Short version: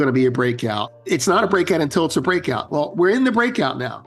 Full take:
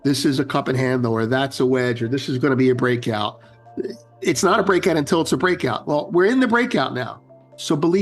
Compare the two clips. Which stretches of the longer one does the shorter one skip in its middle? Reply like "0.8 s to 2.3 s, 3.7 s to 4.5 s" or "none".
3.4 s to 4.1 s